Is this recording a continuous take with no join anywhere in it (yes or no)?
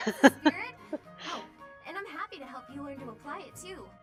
yes